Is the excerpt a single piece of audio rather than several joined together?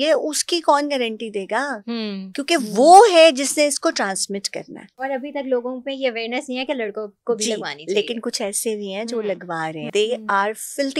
no; 2 cuts; at 4.9 s, 9.9 s

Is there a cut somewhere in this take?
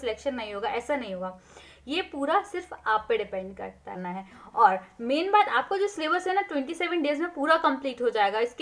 yes; 1 cut; at 4.1 s

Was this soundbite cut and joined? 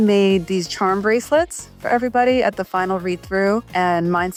no; 0 cuts

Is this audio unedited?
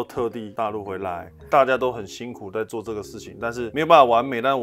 no; 1 cut; at 1.4 s

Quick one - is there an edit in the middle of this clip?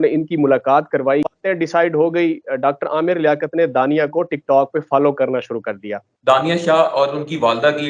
yes; 2 cuts; at 1.3 s, 6.1 s

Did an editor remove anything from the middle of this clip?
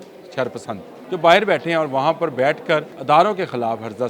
yes; 2 cuts; at 0.9 s, 2.9 s

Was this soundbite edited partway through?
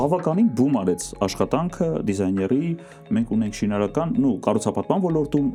no; 0 cuts

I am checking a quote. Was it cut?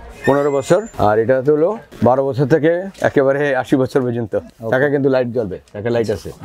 yes; 3 cuts; at 0.9 s, 1.9 s, 4.5 s

